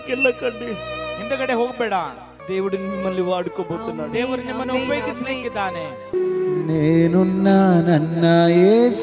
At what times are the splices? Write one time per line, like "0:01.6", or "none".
0:02.3
0:06.1